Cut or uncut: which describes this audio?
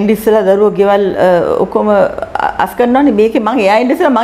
uncut